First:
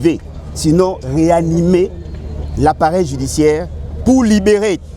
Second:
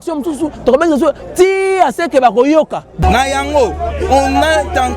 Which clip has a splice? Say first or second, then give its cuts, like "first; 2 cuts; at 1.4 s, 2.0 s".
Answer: second; 1 cut; at 2.8 s